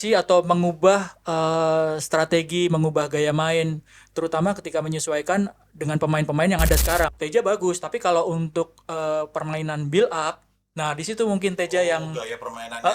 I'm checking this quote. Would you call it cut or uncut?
cut